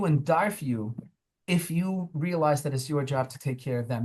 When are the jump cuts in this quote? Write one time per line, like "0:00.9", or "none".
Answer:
none